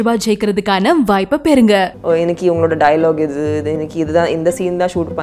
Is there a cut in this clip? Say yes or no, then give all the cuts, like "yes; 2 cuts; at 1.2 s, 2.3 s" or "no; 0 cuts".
yes; 1 cut; at 1.9 s